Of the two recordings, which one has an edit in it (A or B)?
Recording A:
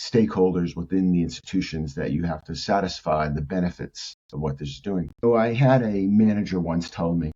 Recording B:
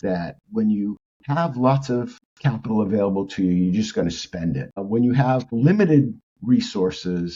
A